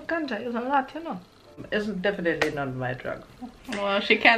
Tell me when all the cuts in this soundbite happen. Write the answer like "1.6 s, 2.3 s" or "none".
1.6 s